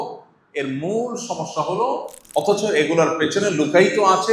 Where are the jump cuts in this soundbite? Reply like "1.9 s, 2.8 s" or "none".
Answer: 2.1 s

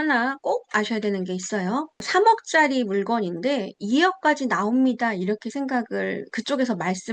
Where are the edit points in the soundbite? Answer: 2.0 s

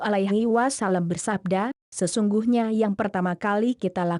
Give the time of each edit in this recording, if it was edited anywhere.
1.8 s

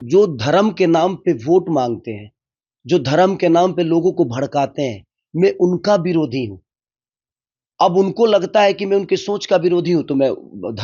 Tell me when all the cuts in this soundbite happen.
none

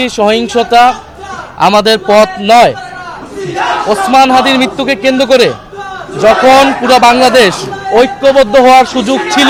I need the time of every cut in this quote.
none

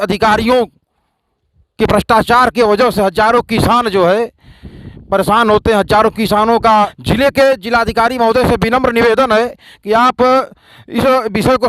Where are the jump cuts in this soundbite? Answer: 7.0 s

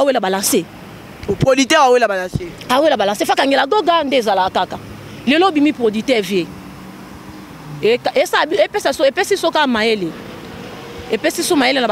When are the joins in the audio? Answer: none

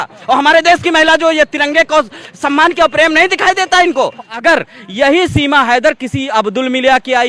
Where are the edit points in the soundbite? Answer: 4.3 s

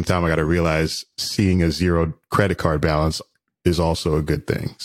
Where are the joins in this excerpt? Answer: none

